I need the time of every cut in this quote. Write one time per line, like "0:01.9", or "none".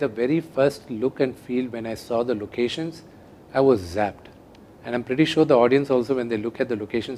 none

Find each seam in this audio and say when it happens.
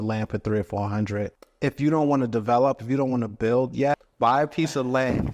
0:01.4
0:04.0

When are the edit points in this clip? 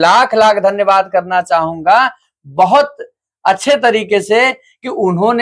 none

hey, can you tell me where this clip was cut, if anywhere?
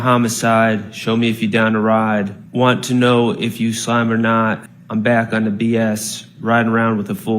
0:02.4
0:04.7

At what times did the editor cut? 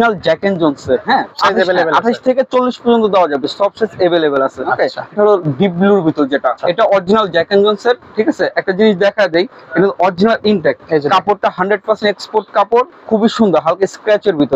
0:01.4
0:05.1
0:06.6
0:10.8

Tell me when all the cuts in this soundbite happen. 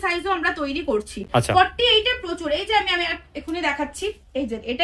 none

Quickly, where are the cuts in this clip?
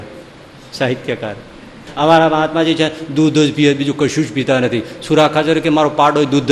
0:01.9

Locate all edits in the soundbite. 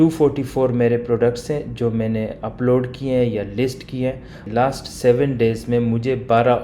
0:04.4

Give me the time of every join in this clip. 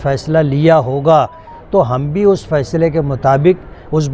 none

